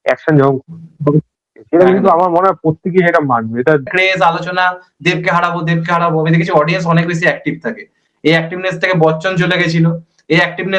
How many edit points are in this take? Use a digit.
1